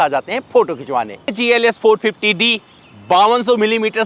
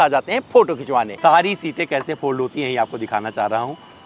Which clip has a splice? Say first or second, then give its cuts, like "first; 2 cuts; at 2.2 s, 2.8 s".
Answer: second; 1 cut; at 1.1 s